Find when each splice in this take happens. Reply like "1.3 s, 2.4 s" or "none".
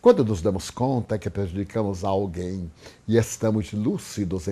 none